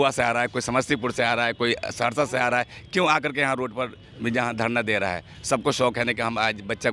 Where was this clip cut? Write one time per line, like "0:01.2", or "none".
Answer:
none